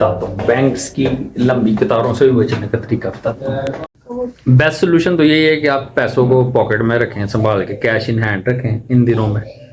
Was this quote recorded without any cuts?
yes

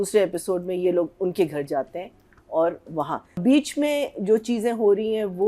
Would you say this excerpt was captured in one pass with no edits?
no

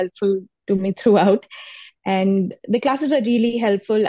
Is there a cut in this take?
no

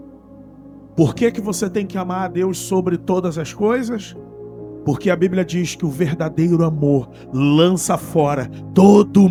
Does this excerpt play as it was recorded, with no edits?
yes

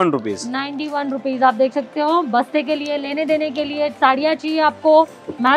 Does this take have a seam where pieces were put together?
no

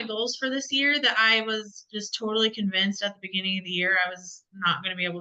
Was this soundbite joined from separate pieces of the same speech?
no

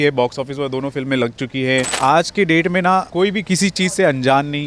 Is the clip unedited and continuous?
no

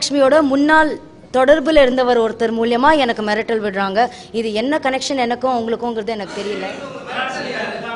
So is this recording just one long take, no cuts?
no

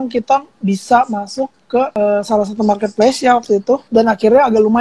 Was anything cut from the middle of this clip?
yes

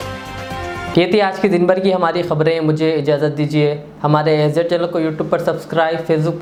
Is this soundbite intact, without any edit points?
yes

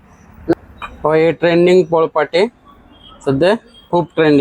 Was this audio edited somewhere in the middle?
no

